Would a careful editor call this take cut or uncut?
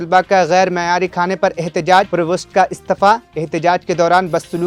uncut